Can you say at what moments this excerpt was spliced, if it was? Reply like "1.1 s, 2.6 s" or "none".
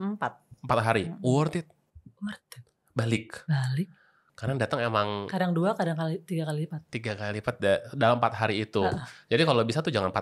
none